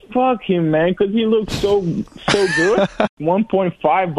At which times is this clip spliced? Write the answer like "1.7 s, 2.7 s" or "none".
3.2 s

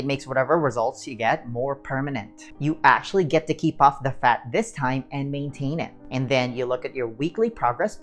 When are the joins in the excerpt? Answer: 2.4 s, 6.0 s

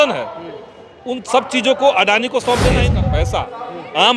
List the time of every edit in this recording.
3.0 s

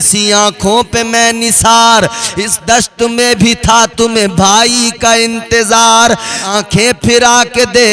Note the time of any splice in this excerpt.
6.4 s

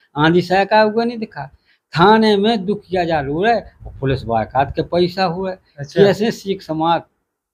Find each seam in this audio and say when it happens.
none

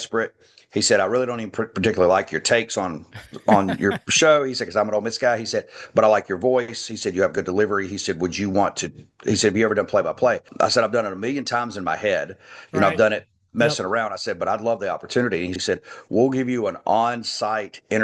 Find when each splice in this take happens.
10.5 s, 15.6 s

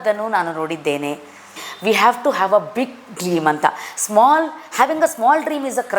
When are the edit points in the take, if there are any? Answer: 1.7 s

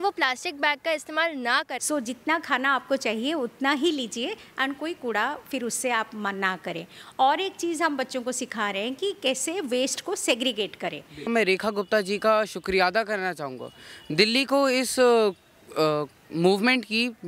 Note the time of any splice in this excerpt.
1.8 s, 11.2 s

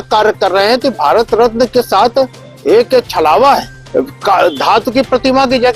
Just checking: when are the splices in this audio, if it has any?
3.8 s

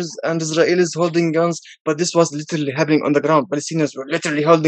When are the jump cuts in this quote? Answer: none

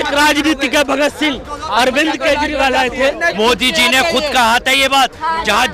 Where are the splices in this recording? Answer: 3.3 s

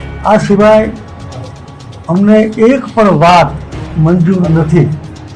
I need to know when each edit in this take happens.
none

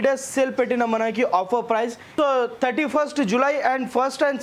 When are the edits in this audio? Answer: 2.0 s

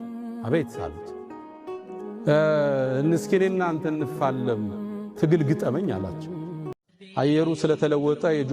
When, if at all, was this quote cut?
7.0 s

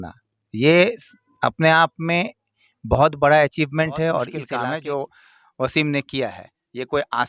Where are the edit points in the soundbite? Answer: 4.4 s

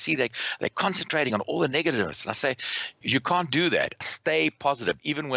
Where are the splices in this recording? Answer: 2.9 s, 4.1 s

